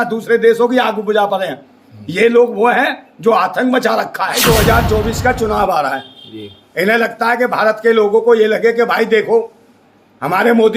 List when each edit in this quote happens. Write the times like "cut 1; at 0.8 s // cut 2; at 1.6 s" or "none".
cut 1; at 4.4 s